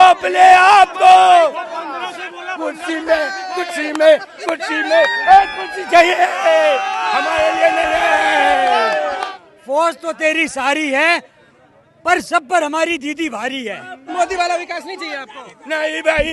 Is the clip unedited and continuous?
no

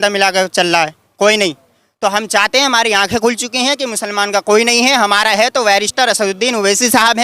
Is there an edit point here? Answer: no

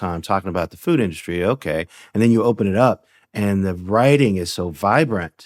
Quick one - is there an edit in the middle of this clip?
no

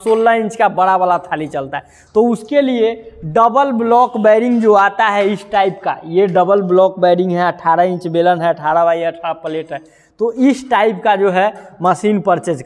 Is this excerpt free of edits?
yes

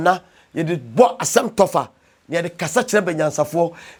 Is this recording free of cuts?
yes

